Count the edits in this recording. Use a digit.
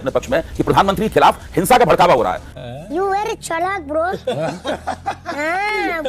0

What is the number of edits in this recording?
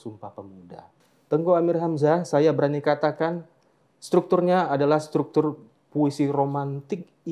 1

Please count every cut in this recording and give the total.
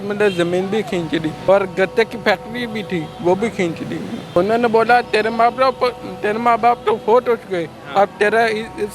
2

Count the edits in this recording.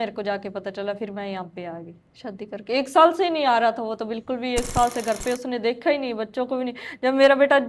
1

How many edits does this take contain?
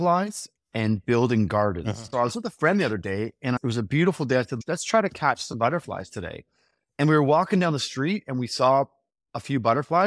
3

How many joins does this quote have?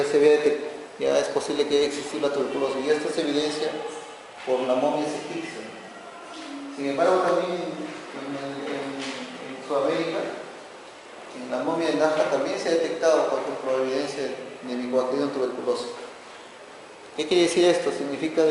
0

